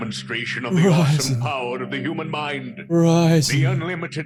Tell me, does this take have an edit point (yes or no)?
no